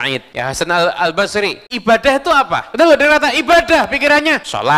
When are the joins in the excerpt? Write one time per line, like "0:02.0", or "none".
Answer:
0:01.6